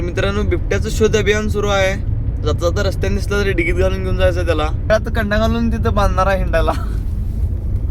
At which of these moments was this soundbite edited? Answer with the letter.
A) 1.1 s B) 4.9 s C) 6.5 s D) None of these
B